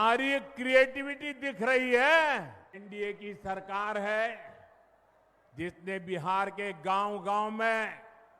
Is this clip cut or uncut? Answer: cut